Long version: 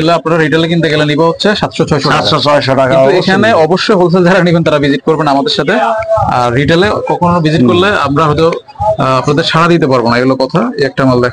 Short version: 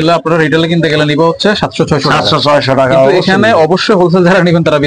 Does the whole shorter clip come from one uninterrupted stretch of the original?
yes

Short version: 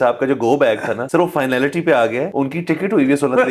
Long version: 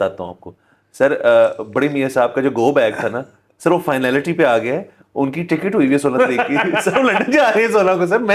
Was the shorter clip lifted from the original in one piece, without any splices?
no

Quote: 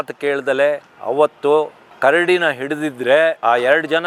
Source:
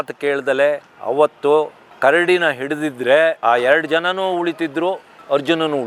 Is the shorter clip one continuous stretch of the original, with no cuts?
yes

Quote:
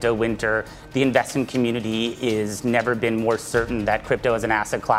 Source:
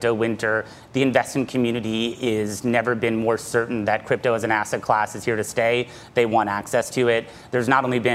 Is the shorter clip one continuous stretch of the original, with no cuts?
yes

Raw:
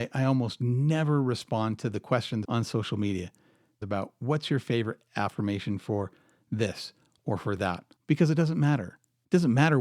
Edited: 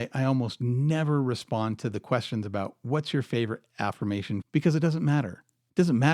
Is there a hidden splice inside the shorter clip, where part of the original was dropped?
yes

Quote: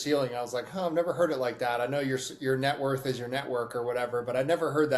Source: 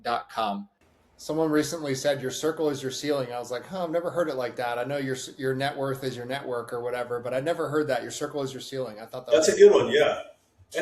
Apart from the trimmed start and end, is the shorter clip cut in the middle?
no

